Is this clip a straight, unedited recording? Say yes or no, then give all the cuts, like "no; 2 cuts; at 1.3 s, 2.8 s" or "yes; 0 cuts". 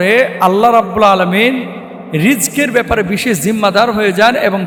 yes; 0 cuts